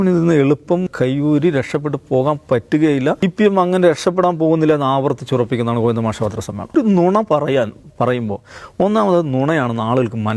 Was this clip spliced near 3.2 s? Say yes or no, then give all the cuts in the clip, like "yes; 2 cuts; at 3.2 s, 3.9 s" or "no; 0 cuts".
yes; 3 cuts; at 0.9 s, 3.2 s, 6.7 s